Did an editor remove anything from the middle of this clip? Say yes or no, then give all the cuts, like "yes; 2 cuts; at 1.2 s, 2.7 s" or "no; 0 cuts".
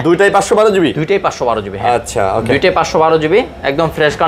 no; 0 cuts